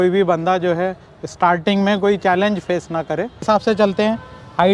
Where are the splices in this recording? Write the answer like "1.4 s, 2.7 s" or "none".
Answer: 3.4 s